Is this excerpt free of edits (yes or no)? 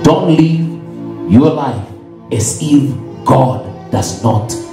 yes